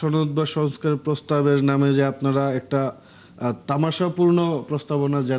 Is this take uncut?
yes; 0 cuts

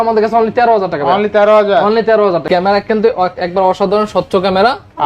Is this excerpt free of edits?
no; 1 cut; at 2.4 s

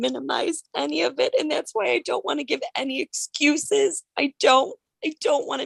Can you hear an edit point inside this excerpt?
no; 0 cuts

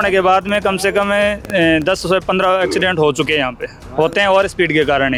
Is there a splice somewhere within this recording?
no; 0 cuts

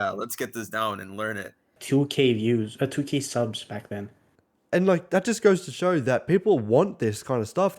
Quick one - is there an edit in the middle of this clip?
yes; 1 cut; at 1.8 s

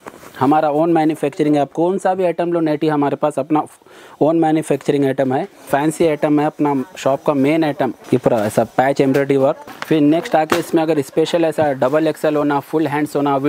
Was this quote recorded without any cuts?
no; 3 cuts; at 5.7 s, 8.0 s, 9.7 s

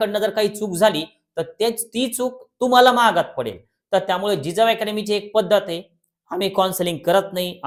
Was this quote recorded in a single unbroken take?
yes; 0 cuts

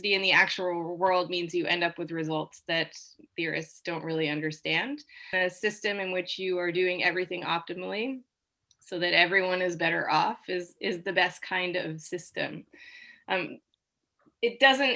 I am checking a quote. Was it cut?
yes; 1 cut; at 5.3 s

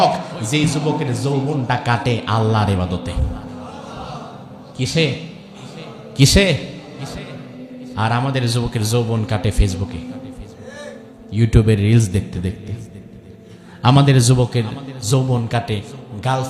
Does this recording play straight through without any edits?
yes; 0 cuts

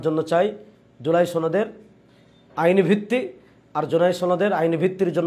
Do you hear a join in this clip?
no; 0 cuts

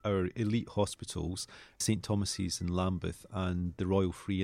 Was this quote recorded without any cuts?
no; 1 cut; at 1.8 s

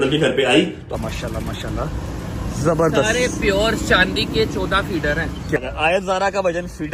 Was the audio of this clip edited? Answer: yes; 2 cuts; at 0.9 s, 5.6 s

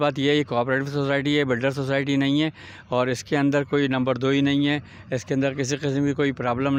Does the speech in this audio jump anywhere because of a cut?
no; 0 cuts

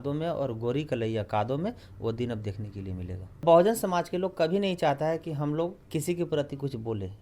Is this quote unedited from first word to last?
no; 2 cuts; at 3.4 s, 5.8 s

